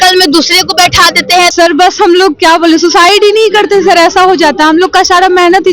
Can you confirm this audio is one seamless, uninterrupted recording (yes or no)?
no